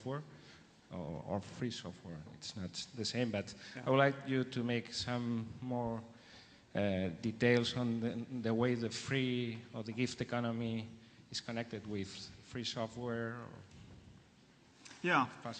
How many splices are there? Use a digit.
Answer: 1